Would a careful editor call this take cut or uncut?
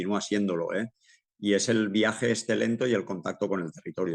uncut